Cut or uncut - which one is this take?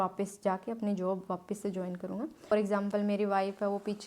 cut